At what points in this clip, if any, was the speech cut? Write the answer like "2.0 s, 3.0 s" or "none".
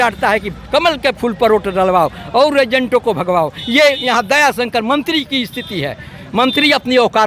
none